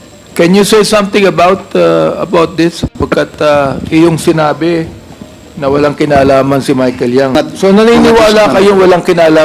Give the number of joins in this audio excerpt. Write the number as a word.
one